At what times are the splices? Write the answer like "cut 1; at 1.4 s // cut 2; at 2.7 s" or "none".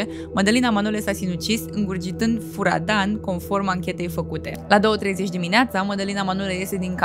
cut 1; at 4.5 s